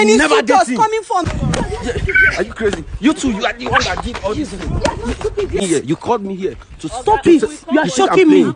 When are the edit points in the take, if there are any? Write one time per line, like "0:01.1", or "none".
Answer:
0:01.2
0:05.6